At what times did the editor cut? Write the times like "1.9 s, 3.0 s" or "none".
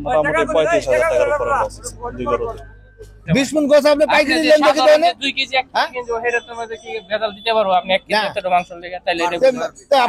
3.2 s

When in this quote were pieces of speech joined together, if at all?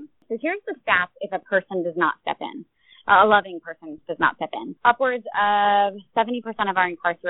4.7 s

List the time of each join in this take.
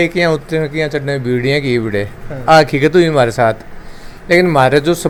none

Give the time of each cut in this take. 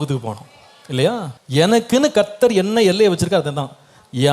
1.4 s

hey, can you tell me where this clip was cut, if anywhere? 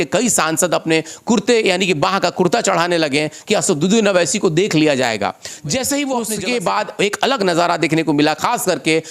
6.3 s

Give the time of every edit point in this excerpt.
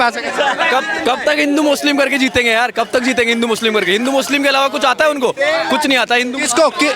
none

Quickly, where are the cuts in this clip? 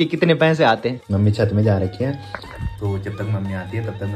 1.1 s

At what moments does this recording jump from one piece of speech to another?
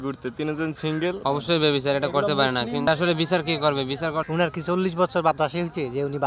1.2 s, 4.2 s

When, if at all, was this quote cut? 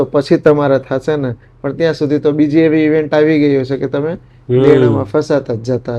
none

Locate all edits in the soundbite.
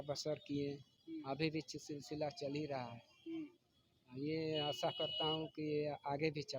none

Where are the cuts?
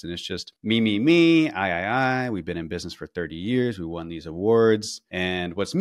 none

